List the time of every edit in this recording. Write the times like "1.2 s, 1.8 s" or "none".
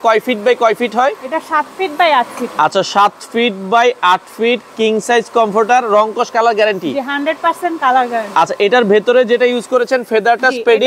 none

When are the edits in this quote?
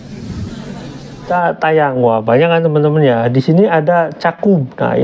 1.3 s

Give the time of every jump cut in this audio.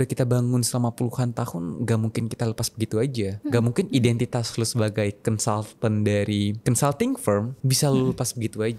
6.6 s, 7.6 s

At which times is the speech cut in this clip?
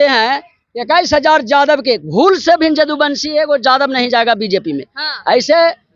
none

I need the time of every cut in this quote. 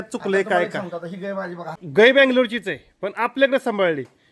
1.8 s

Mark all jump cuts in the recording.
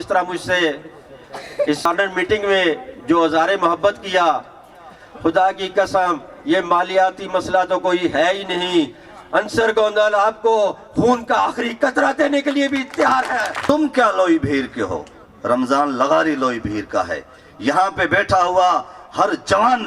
1.9 s, 13.5 s

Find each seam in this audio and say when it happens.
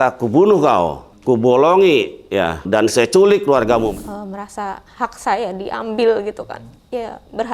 1.1 s, 2.6 s, 3.9 s, 6.5 s

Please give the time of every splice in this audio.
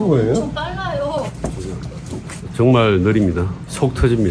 1.4 s, 2.4 s

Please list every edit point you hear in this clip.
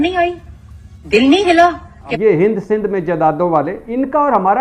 2.0 s

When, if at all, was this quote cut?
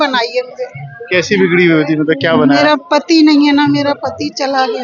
none

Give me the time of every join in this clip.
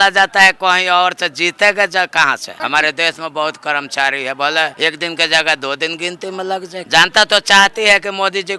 2.5 s, 4.7 s, 6.8 s

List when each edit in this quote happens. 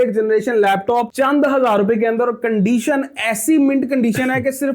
none

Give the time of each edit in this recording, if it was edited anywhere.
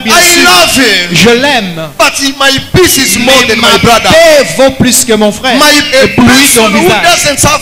5.8 s

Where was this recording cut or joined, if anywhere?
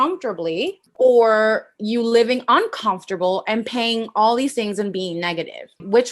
none

